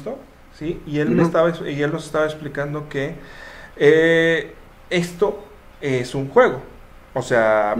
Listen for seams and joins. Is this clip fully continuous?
yes; 0 cuts

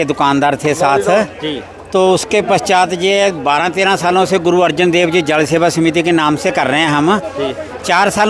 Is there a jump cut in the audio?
no; 0 cuts

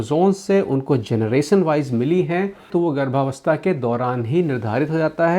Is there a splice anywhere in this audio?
no; 0 cuts

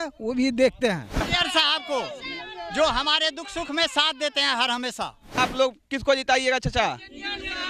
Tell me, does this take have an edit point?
yes; 2 cuts; at 1.3 s, 5.4 s

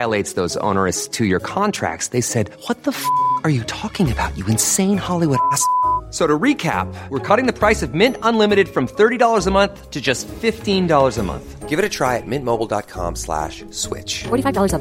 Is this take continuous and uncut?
yes; 0 cuts

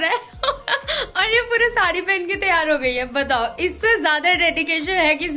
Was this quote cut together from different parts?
no; 0 cuts

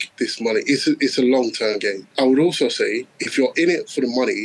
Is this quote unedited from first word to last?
no; 1 cut; at 2.0 s

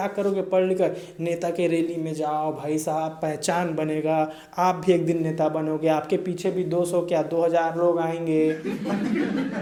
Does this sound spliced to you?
no; 0 cuts

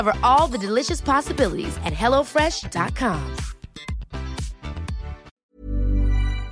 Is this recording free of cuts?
no; 1 cut; at 5.3 s

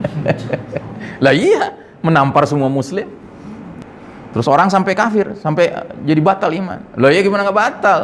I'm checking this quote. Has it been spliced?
yes; 1 cut; at 3.8 s

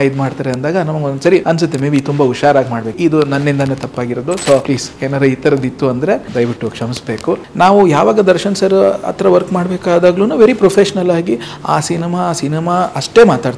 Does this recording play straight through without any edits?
no; 5 cuts; at 1.4 s, 2.9 s, 4.6 s, 6.3 s, 7.5 s

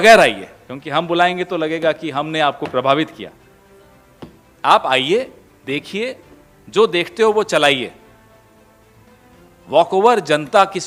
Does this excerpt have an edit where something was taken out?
no; 0 cuts

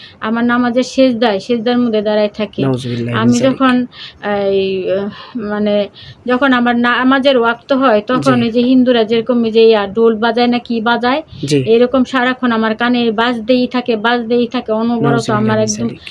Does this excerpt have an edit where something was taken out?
no; 0 cuts

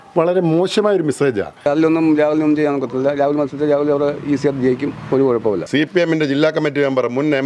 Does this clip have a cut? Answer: yes; 2 cuts; at 1.7 s, 5.6 s

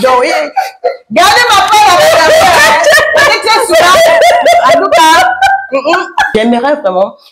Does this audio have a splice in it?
yes; 1 cut; at 6.3 s

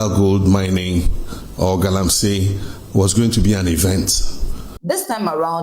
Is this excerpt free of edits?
no; 1 cut; at 4.7 s

